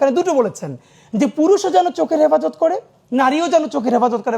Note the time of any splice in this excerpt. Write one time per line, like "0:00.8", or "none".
none